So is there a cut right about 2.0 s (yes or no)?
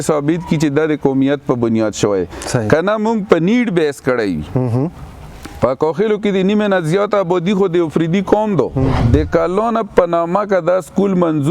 no